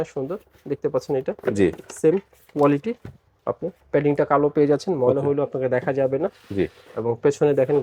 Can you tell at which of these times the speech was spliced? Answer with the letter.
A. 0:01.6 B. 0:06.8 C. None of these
C